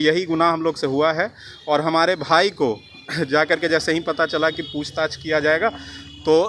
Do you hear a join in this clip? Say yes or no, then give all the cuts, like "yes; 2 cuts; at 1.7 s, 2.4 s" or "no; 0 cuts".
no; 0 cuts